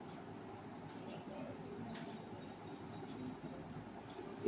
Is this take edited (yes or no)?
no